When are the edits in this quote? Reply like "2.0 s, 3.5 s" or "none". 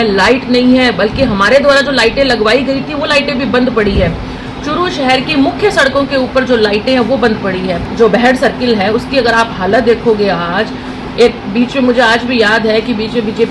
none